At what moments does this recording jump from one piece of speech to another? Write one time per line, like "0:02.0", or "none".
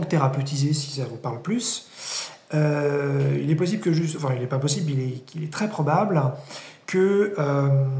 none